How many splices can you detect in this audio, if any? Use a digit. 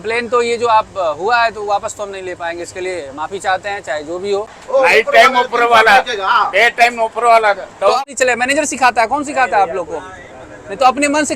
2